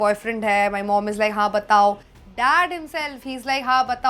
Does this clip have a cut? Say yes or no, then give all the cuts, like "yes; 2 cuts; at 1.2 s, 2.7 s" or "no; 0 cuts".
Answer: no; 0 cuts